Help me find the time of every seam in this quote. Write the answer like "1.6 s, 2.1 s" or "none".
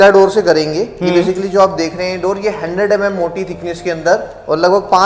none